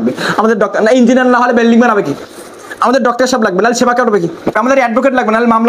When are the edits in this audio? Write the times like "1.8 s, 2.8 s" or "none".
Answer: 4.6 s